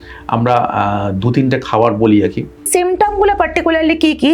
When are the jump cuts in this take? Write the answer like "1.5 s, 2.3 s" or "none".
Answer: 2.7 s